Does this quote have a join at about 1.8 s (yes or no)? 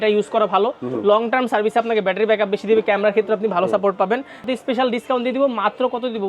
no